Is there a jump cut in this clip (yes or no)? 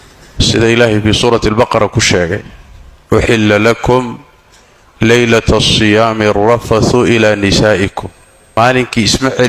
yes